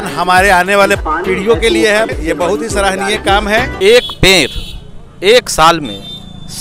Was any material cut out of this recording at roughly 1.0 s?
yes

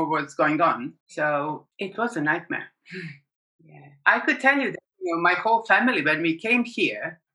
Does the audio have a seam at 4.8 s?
no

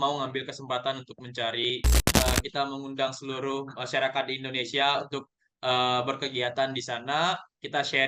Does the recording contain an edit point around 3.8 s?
no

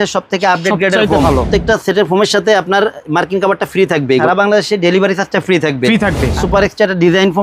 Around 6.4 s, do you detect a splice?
yes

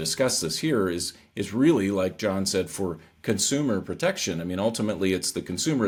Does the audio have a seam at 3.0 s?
no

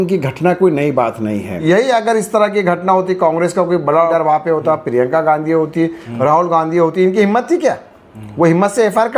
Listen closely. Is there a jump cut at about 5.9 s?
no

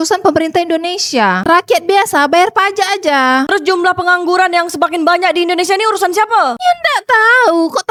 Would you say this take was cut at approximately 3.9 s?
no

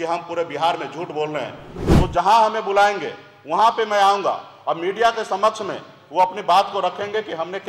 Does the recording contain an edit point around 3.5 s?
no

